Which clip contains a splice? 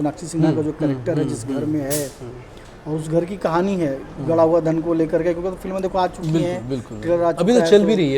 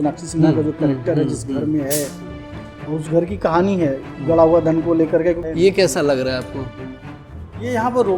second; 1 cut; at 5.4 s

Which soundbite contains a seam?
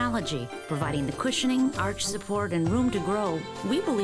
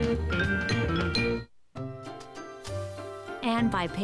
second; 1 cut; at 1.6 s

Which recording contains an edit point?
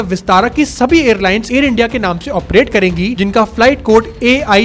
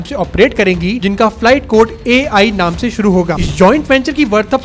second; 1 cut; at 3.4 s

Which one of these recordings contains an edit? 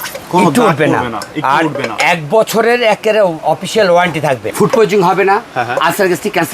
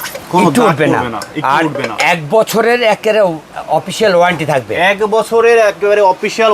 first; 2 cuts; at 3.4 s, 4.4 s

